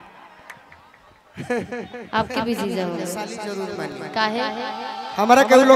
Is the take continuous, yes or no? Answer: no